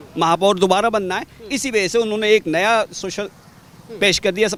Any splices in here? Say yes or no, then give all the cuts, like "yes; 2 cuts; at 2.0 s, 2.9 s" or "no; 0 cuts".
no; 0 cuts